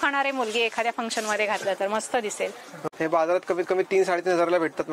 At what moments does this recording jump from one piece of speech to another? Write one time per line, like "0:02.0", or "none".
0:02.7